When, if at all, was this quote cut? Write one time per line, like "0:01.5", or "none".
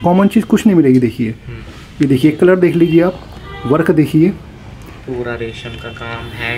none